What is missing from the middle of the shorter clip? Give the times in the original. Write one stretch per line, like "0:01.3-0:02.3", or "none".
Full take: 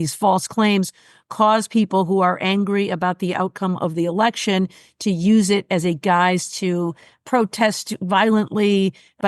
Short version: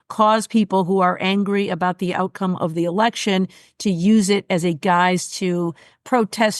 none